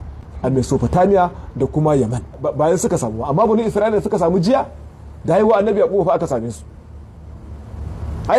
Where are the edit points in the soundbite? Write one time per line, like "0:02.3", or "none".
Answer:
0:02.5